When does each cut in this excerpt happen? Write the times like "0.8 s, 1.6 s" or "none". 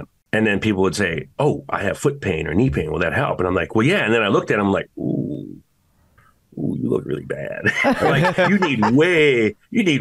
none